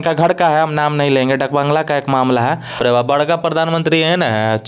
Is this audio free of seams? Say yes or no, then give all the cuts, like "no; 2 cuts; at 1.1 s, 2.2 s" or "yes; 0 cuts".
no; 1 cut; at 2.8 s